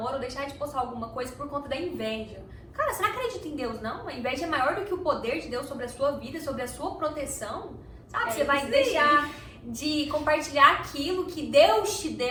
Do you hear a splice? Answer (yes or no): no